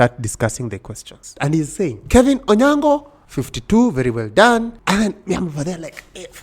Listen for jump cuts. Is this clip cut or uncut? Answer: cut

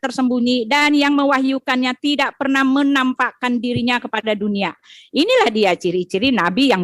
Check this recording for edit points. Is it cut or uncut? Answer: uncut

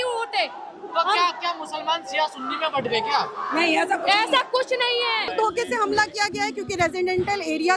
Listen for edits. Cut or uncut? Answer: cut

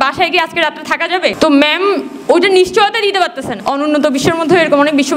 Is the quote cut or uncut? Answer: cut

